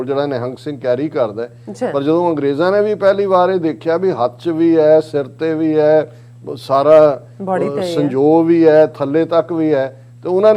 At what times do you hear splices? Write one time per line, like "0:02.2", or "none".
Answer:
none